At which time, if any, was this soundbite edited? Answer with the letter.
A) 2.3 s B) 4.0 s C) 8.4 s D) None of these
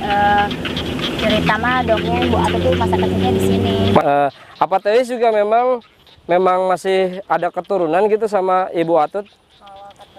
B